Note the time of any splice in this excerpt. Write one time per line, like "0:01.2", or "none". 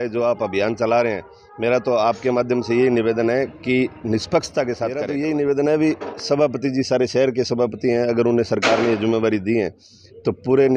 0:05.0